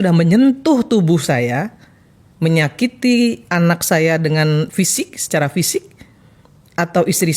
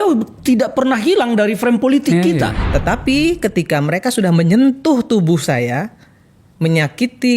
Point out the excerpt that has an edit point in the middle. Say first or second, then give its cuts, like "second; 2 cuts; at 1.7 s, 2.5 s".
second; 1 cut; at 2.6 s